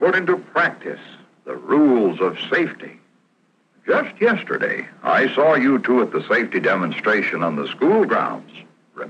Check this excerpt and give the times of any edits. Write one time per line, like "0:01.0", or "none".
none